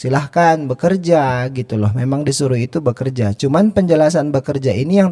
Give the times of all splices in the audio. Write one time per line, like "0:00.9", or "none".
none

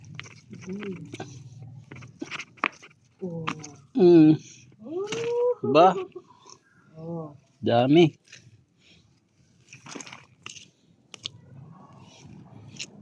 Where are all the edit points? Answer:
none

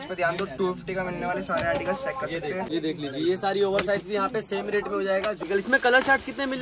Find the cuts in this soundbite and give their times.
0:02.6
0:05.4

